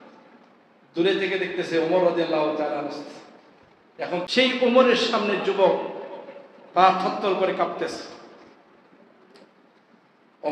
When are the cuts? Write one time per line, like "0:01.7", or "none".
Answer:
0:04.2